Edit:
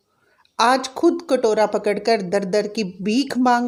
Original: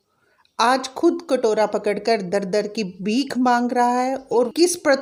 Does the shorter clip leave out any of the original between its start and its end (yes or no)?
no